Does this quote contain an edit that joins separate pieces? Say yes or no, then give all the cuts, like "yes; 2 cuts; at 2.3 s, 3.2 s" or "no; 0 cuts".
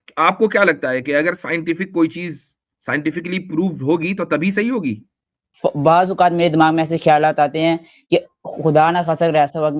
yes; 1 cut; at 5.4 s